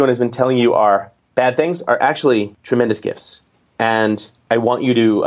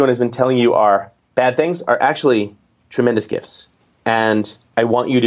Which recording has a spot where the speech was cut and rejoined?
first; 1 cut; at 2.6 s

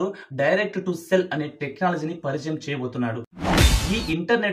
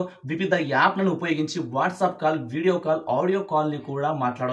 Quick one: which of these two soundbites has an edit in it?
first; 1 cut; at 3.5 s

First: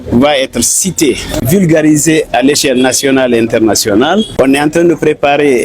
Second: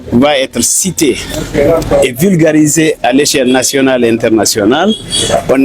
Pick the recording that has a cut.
first; 2 cuts; at 1.4 s, 4.3 s

